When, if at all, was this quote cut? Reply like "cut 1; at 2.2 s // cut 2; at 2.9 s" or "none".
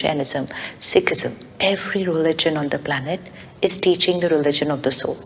none